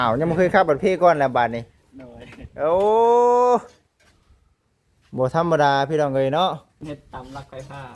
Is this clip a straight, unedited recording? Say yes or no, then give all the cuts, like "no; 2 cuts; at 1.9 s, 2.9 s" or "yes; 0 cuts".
no; 1 cut; at 6.8 s